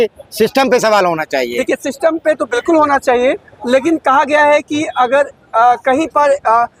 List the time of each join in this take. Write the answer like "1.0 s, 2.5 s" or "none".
none

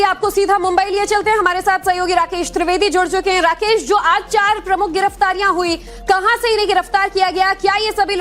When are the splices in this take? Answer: 4.9 s

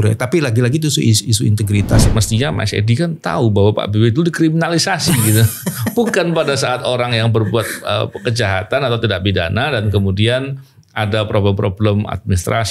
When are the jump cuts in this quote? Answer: 2.0 s

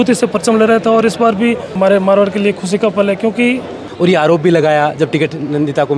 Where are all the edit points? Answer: 1.8 s, 3.8 s

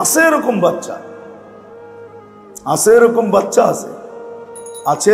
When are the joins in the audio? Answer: none

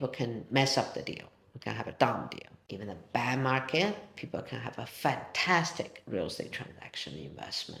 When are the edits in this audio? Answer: none

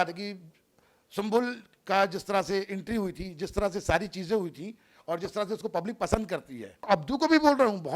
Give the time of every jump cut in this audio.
6.9 s

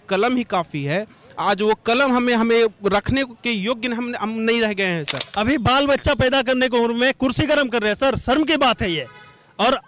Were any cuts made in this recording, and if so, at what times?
5.2 s

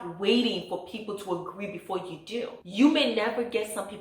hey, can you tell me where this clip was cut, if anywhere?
2.6 s

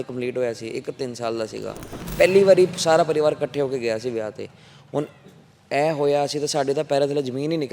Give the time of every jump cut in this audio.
2.0 s

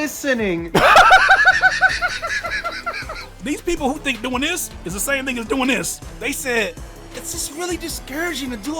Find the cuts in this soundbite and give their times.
3.3 s, 6.0 s

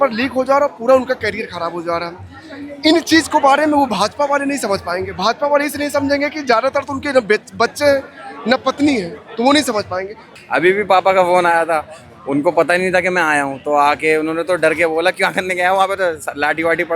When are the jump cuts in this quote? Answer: 10.3 s

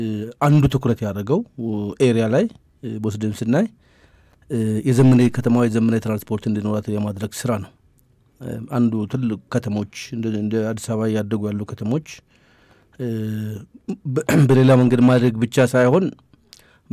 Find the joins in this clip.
none

